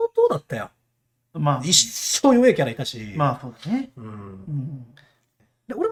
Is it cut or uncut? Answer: uncut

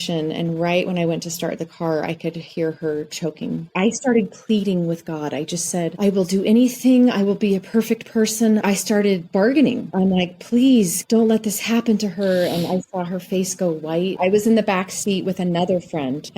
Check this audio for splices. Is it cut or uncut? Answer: cut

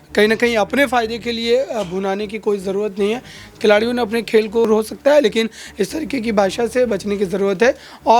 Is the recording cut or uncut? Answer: cut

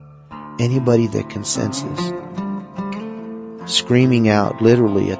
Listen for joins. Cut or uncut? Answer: cut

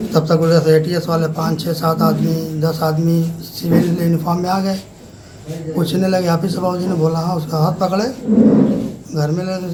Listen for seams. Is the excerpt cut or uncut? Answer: uncut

